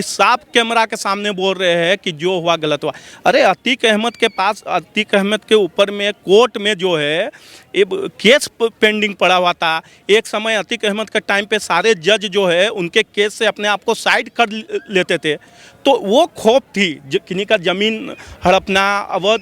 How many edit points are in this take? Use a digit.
0